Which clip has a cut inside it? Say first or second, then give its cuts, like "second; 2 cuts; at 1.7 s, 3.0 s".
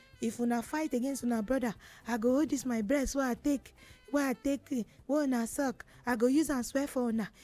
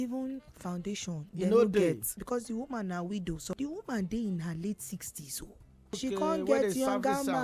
second; 4 cuts; at 1.3 s, 2.1 s, 3.5 s, 6.0 s